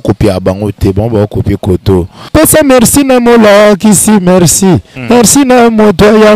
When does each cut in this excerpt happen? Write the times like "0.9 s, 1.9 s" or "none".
2.3 s